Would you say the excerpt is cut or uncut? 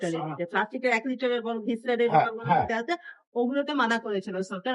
uncut